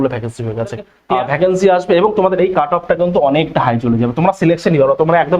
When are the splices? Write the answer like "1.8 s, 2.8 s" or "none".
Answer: 0.9 s